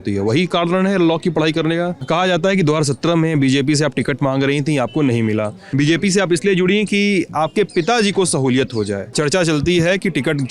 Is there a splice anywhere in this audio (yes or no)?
yes